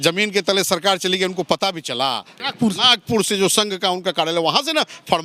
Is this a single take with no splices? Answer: no; 1 cut; at 2.4 s

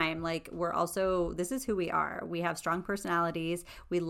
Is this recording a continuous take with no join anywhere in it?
yes; 0 cuts

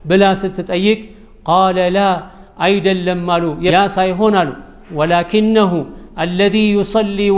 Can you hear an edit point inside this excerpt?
yes; 1 cut; at 3.7 s

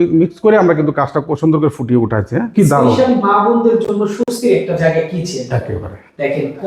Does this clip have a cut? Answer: yes; 1 cut; at 2.5 s

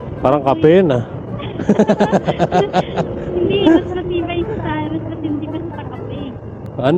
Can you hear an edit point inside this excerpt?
no; 0 cuts

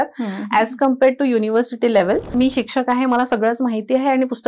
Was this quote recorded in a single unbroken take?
no; 1 cut; at 2.3 s

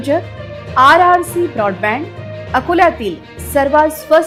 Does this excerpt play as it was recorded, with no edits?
yes; 0 cuts

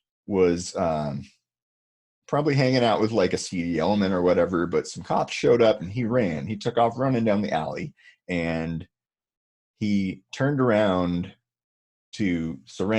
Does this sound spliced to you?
no; 0 cuts

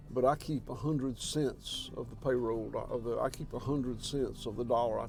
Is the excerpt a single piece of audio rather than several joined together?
yes; 0 cuts

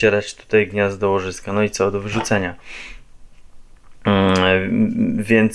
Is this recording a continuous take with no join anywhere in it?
yes; 0 cuts

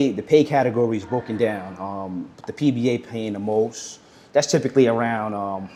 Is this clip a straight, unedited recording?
yes; 0 cuts

